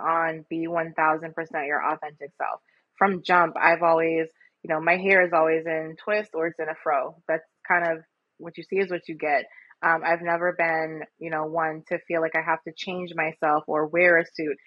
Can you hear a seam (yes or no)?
no